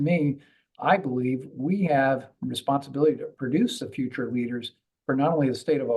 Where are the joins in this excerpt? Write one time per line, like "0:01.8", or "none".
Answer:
0:02.3

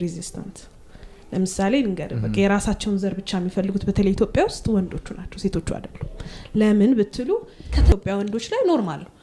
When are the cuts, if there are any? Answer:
0:07.9

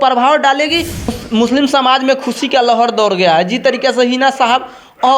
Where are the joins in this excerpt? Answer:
0:01.1

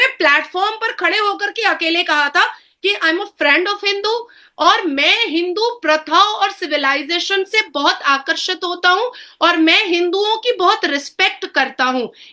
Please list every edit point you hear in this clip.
none

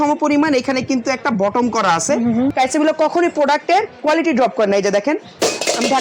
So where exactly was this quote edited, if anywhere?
0:02.5

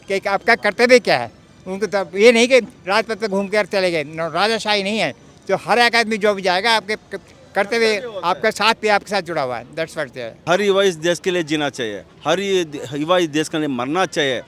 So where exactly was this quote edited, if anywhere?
0:10.3

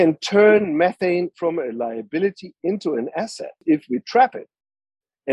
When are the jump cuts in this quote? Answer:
0:03.6

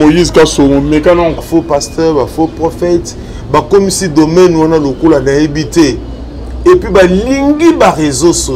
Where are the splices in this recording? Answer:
0:01.4

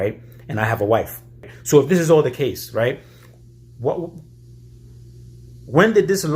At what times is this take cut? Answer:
0:01.5

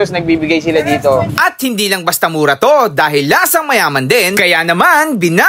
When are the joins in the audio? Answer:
0:01.2

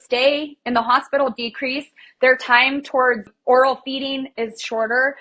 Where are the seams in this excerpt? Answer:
0:03.3

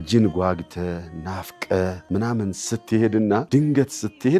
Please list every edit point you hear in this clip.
0:02.0
0:03.4

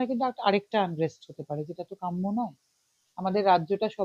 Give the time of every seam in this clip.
0:03.0

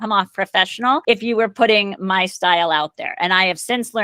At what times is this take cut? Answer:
0:01.0

